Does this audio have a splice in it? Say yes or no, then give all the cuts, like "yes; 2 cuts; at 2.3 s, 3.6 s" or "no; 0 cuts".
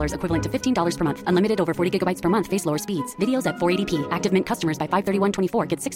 no; 0 cuts